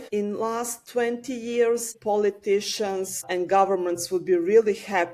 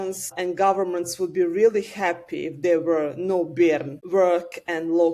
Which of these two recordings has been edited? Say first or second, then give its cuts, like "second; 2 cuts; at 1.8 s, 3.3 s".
first; 1 cut; at 2.0 s